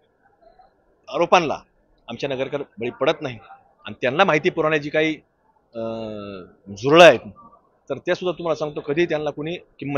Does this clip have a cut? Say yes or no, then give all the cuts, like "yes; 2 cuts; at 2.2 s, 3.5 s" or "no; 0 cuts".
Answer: no; 0 cuts